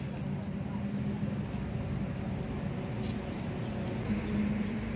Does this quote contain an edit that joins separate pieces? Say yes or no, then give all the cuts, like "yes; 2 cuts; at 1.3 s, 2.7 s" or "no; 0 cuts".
yes; 1 cut; at 4.0 s